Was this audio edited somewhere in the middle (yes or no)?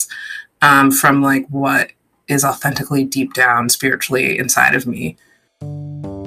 yes